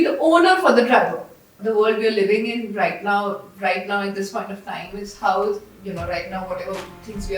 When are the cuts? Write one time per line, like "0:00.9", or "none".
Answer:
0:01.6